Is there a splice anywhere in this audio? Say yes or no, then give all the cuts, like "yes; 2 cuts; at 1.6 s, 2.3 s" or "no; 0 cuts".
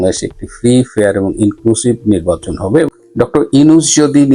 yes; 1 cut; at 2.9 s